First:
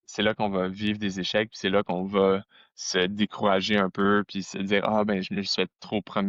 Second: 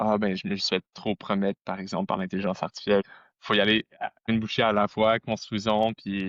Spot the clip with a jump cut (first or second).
second